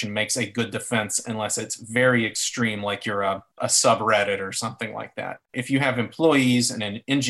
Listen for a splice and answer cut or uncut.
cut